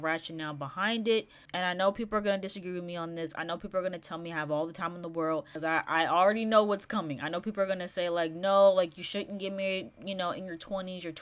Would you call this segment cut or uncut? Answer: cut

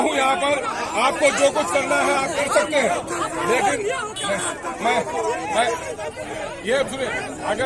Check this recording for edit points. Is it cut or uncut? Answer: uncut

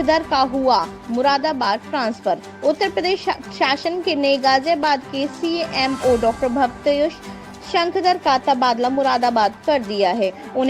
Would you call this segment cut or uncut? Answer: uncut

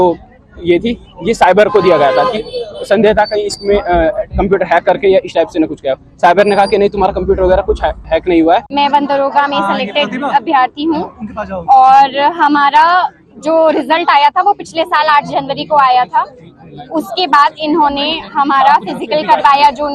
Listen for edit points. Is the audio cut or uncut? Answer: cut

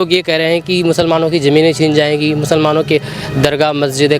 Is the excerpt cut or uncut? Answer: uncut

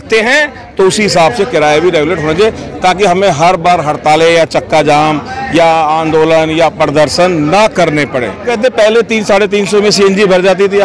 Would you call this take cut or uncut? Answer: cut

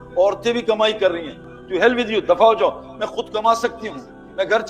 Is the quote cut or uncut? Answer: cut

